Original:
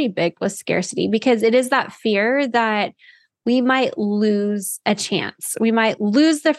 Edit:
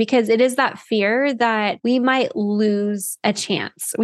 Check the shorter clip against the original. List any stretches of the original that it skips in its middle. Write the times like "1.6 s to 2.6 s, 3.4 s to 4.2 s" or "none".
2.9 s to 3.4 s